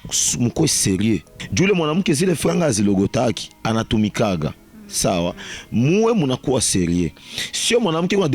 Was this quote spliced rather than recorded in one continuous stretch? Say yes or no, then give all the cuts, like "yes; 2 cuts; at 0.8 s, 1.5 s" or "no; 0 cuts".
yes; 1 cut; at 1.4 s